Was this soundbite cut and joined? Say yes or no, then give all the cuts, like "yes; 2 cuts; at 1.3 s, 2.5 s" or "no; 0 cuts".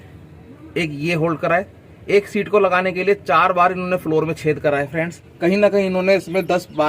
yes; 1 cut; at 5.2 s